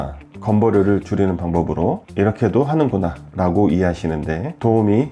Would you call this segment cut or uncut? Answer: uncut